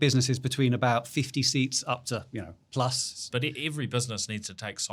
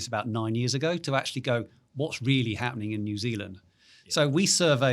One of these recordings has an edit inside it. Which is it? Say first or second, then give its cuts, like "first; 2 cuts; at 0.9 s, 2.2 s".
first; 1 cut; at 3.1 s